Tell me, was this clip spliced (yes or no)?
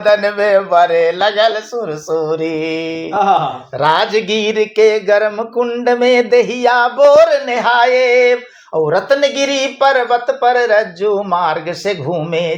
no